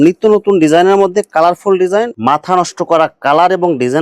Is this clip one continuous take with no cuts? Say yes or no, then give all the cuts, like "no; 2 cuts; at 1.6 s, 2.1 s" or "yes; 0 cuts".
no; 1 cut; at 2.1 s